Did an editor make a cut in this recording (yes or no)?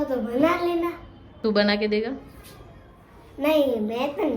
yes